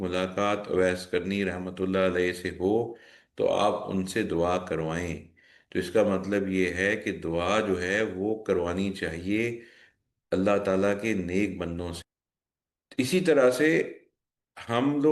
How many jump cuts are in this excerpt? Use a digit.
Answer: 1